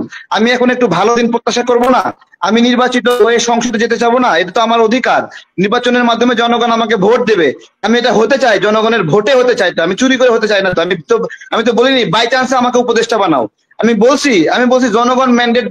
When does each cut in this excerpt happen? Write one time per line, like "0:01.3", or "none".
none